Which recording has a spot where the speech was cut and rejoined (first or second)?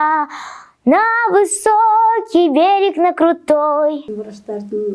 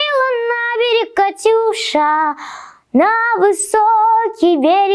first